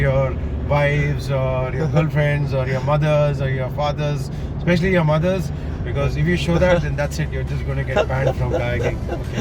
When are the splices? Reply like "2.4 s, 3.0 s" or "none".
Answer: none